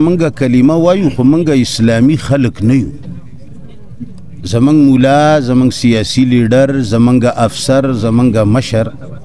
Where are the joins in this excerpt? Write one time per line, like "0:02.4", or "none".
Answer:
none